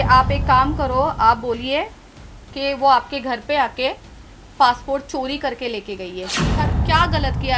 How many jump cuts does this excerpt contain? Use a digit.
1